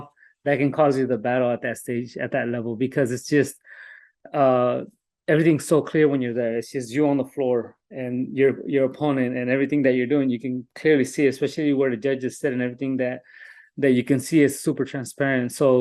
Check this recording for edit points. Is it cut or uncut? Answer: uncut